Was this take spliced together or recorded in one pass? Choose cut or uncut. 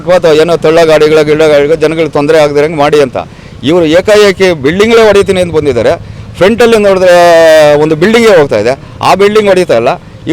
uncut